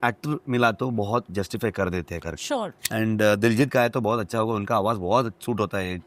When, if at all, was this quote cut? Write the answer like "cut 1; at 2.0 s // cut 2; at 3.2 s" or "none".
cut 1; at 2.8 s